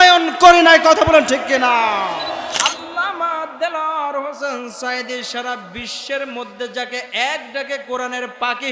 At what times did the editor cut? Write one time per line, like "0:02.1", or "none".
0:02.6